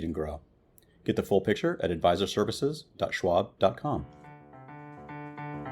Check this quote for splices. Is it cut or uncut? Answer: cut